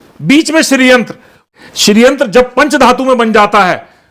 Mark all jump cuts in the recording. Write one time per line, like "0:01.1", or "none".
0:01.4